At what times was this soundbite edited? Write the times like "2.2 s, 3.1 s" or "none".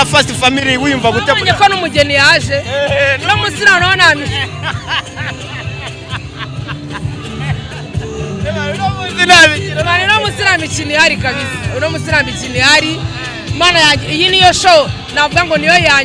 none